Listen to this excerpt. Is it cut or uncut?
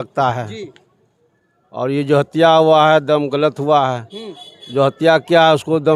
uncut